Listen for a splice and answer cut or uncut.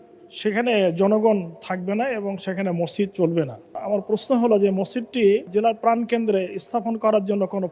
cut